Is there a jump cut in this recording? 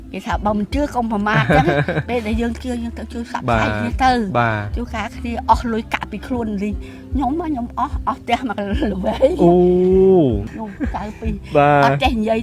yes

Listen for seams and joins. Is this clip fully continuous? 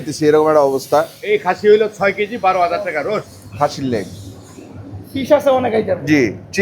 no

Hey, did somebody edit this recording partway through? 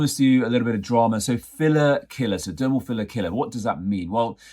no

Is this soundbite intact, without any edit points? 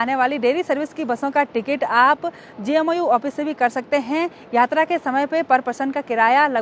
yes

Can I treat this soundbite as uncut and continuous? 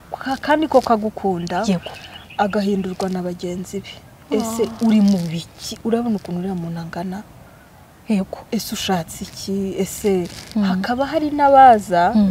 no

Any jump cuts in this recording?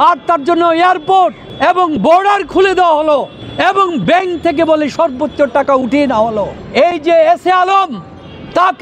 yes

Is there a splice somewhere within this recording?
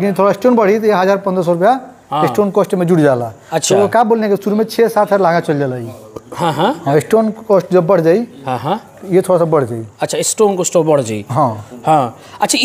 no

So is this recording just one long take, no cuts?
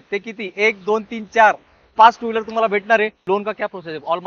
no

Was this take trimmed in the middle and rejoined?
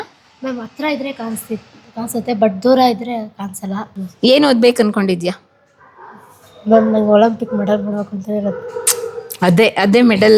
yes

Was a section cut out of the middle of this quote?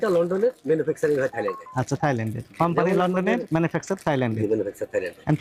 no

